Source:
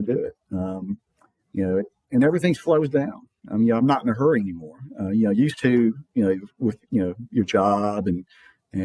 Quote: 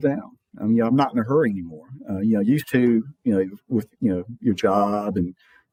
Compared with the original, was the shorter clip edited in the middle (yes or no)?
no